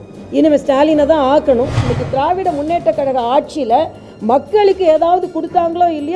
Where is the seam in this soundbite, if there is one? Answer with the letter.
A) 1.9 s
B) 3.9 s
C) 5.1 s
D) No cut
A